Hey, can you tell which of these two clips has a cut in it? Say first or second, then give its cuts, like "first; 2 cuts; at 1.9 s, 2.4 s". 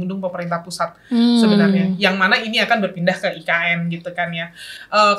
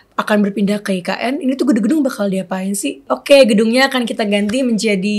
second; 1 cut; at 3.1 s